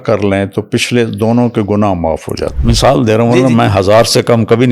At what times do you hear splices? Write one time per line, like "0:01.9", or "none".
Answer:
0:02.5